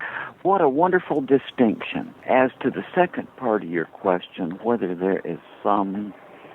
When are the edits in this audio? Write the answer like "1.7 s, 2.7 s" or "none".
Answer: 2.2 s